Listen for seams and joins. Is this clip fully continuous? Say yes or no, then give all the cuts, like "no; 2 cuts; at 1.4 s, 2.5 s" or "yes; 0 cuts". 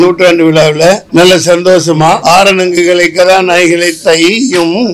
no; 2 cuts; at 1.0 s, 2.2 s